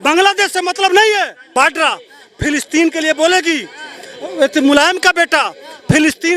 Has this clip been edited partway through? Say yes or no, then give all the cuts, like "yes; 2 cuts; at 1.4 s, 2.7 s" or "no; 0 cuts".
yes; 1 cut; at 1.4 s